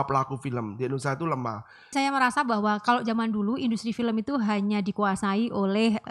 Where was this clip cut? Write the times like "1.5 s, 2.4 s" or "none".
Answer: 1.9 s